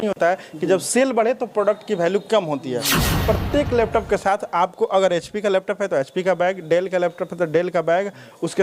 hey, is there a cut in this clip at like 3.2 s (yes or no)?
yes